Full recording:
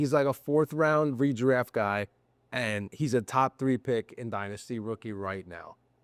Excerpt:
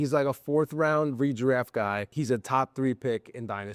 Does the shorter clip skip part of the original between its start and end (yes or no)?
yes